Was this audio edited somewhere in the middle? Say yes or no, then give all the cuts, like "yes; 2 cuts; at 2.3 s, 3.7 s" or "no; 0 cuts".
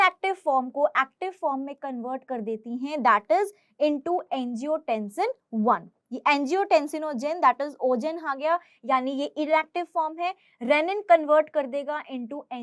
no; 0 cuts